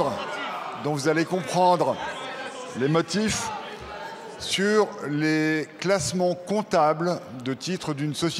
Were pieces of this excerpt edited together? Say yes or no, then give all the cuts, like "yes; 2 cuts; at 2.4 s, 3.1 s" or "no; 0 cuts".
no; 0 cuts